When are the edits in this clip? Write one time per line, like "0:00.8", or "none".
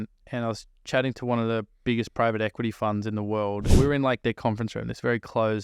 0:03.7